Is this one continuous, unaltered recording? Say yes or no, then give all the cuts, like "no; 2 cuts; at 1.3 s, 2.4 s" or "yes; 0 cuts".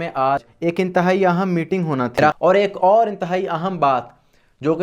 no; 1 cut; at 2.4 s